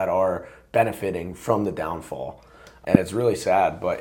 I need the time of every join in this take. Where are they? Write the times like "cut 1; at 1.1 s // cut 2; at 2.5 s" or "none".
cut 1; at 2.6 s